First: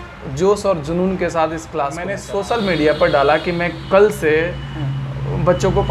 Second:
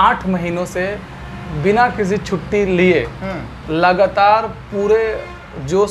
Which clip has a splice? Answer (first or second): first